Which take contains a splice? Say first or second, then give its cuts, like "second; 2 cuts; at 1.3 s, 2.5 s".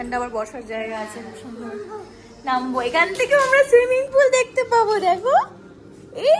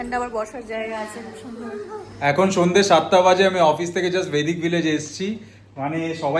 second; 1 cut; at 2.1 s